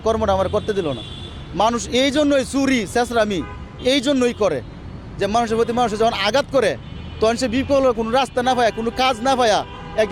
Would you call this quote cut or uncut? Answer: uncut